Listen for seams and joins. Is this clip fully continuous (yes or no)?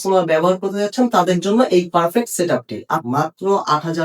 no